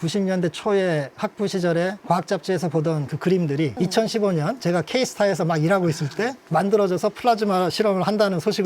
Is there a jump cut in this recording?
yes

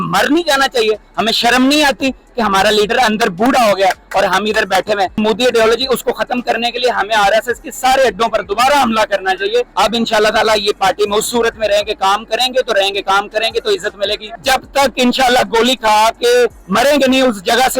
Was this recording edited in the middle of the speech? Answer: yes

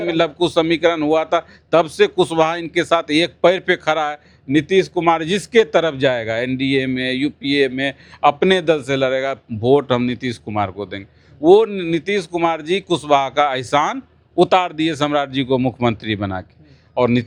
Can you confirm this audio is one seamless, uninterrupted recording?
yes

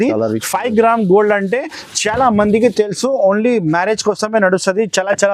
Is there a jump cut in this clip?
no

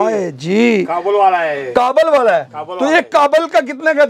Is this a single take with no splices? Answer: yes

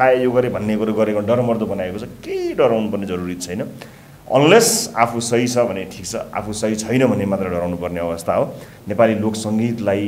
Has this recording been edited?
yes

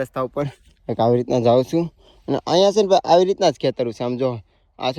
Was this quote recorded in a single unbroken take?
yes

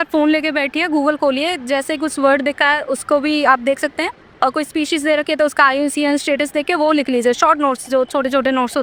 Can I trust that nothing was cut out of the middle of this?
yes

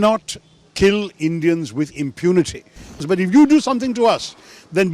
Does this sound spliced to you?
yes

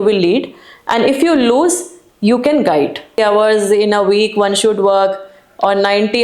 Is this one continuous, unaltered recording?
no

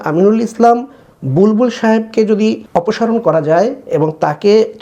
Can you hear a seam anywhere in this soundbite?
yes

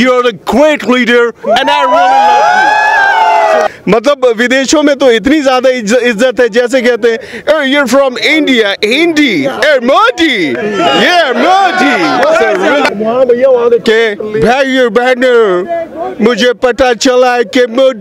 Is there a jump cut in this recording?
yes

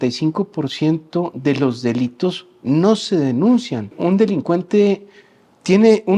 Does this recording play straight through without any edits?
no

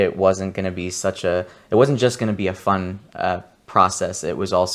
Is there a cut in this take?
no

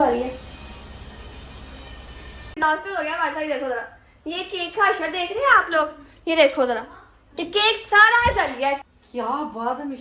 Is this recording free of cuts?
no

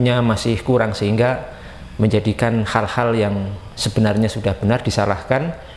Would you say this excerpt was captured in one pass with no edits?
yes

